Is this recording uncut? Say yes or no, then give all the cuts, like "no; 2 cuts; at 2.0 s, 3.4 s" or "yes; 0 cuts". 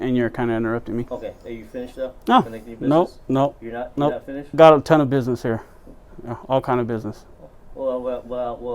no; 1 cut; at 1.1 s